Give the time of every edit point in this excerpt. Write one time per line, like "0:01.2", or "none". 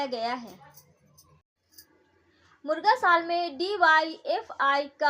0:01.5